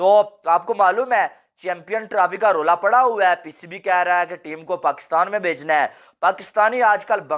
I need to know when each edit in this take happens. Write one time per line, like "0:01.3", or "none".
none